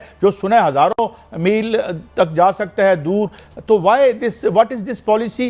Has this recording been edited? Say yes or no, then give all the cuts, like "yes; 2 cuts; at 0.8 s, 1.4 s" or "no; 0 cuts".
no; 0 cuts